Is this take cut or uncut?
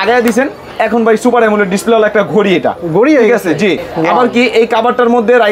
uncut